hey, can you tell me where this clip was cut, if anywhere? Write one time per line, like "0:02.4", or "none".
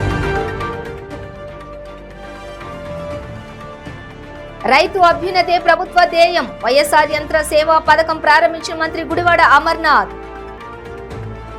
none